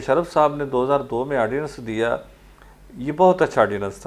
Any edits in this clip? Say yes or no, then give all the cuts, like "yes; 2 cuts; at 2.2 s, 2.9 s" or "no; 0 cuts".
no; 0 cuts